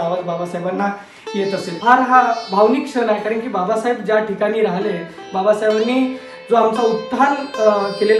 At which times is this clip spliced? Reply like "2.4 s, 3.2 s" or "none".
1.7 s